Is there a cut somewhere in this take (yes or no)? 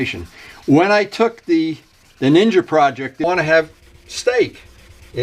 yes